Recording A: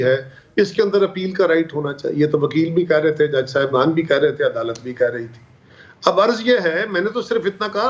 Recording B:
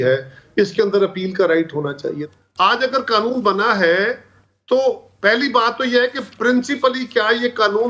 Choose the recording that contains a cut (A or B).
B